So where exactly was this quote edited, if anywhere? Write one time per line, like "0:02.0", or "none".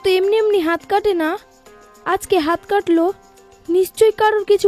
none